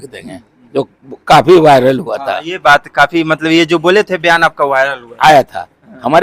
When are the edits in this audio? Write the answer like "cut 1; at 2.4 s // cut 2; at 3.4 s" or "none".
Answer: none